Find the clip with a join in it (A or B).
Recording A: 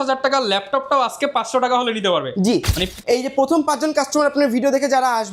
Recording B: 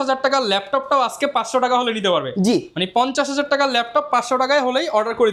A